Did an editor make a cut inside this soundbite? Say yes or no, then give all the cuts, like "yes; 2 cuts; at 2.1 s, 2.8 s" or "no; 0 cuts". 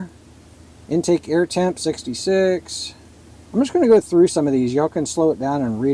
no; 0 cuts